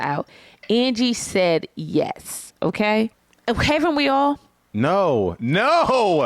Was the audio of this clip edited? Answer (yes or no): yes